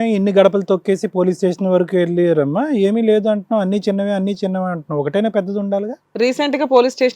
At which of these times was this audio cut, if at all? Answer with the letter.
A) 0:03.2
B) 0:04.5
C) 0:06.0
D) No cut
C